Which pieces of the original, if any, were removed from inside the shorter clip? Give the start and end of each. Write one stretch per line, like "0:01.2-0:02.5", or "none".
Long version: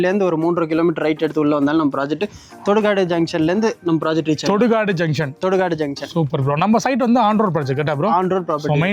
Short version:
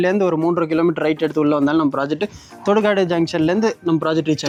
none